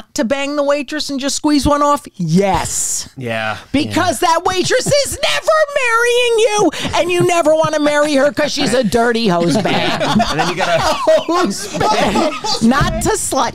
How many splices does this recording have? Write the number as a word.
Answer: zero